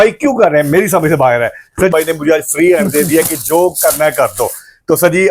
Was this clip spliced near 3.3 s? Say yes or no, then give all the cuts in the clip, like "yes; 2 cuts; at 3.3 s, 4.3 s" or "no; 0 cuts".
no; 1 cut; at 1.9 s